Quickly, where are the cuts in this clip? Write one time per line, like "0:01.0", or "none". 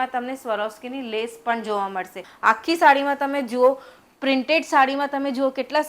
0:02.2